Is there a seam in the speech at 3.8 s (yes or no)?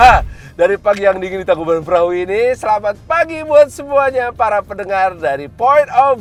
no